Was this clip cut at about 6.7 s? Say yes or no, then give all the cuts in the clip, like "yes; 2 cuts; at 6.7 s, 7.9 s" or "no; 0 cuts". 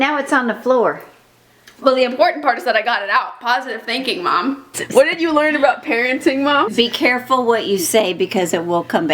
yes; 2 cuts; at 4.8 s, 6.7 s